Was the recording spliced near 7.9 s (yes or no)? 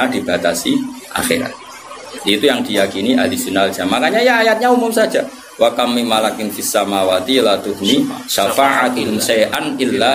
no